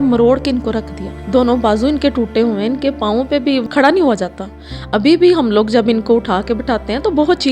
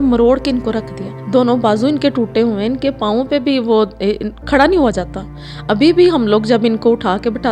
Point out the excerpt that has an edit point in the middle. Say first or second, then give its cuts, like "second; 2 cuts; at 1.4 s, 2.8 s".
first; 1 cut; at 3.6 s